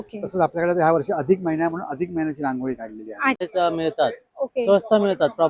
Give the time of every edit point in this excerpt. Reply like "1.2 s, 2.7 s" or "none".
3.5 s